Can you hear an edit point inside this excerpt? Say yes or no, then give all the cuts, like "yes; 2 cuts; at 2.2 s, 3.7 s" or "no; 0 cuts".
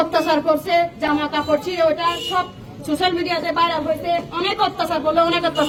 no; 0 cuts